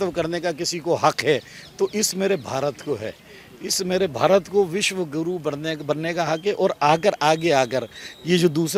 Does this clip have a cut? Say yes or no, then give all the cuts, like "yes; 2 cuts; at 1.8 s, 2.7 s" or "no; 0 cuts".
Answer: no; 0 cuts